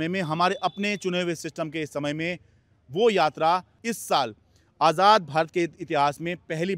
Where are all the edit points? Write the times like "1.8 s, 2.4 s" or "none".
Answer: 3.8 s